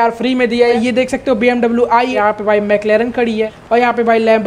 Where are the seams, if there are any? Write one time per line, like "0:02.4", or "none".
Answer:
0:00.7
0:02.2
0:03.6